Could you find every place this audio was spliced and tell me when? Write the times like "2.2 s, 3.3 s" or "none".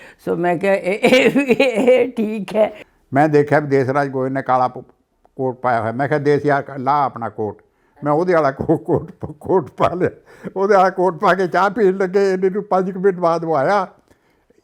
2.8 s